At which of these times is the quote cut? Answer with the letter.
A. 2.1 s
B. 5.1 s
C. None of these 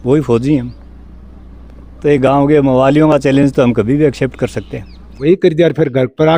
B